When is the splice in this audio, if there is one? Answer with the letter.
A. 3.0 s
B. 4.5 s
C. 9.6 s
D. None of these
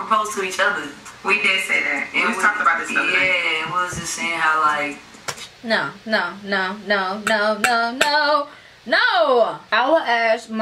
C